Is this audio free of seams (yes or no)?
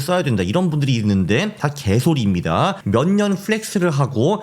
no